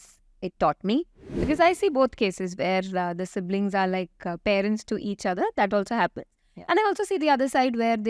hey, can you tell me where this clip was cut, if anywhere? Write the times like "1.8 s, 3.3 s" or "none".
1.3 s